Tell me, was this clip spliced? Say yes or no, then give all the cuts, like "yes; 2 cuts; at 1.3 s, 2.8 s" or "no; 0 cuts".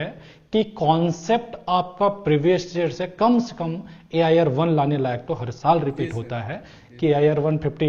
no; 0 cuts